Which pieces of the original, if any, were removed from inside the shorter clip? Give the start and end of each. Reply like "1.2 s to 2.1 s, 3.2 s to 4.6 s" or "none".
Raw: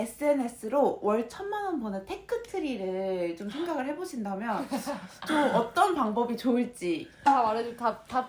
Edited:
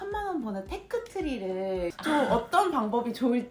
3.3 s to 5.2 s